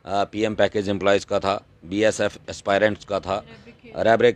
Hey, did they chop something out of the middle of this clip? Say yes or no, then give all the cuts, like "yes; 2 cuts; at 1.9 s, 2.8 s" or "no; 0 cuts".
no; 0 cuts